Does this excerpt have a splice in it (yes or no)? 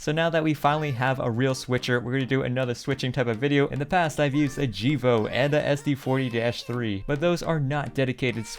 no